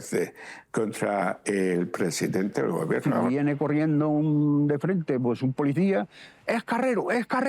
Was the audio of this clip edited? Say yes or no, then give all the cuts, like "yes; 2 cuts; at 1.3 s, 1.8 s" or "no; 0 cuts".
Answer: yes; 1 cut; at 3.1 s